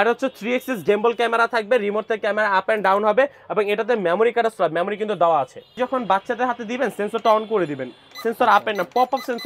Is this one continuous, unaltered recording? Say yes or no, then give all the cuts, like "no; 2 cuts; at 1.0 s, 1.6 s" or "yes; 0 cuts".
no; 1 cut; at 5.7 s